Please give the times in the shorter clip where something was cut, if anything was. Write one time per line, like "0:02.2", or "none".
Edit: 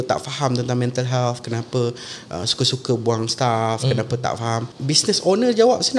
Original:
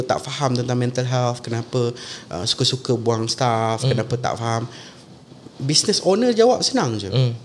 0:04.7